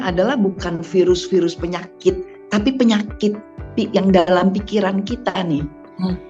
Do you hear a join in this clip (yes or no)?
no